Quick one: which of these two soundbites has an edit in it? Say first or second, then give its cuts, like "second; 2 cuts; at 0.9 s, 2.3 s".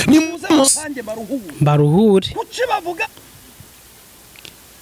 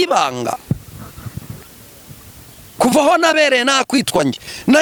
first; 1 cut; at 3.0 s